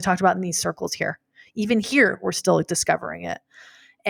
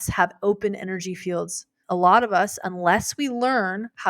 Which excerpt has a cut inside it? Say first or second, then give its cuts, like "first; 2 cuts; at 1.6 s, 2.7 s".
second; 1 cut; at 1.7 s